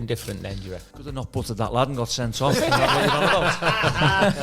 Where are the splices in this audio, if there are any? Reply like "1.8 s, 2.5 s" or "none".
0.9 s